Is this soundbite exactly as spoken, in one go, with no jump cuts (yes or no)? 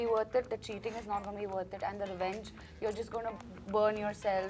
no